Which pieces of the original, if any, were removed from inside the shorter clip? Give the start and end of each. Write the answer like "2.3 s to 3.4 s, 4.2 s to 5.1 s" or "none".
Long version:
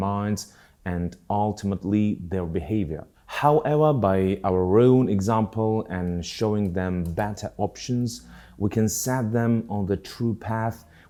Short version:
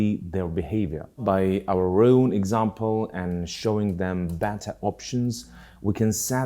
3.2 s to 4.0 s